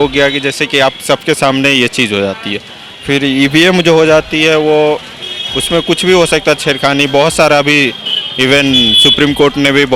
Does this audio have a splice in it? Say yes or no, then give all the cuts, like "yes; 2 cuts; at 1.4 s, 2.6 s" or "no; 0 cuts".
no; 0 cuts